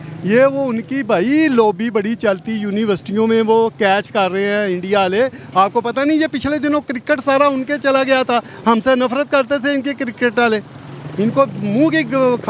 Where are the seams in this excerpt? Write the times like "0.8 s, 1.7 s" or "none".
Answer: none